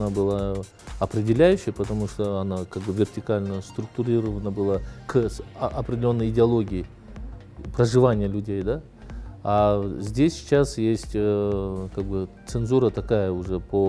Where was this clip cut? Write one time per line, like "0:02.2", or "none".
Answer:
none